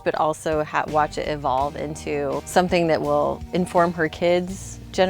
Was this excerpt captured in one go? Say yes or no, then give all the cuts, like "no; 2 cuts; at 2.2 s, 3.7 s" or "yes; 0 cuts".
no; 2 cuts; at 2.4 s, 3.4 s